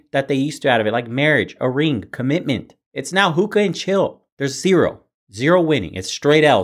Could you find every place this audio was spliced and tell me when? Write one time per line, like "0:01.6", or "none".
0:02.8